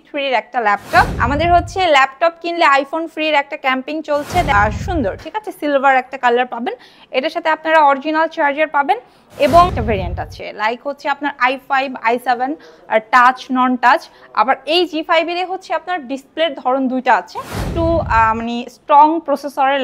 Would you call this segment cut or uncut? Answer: cut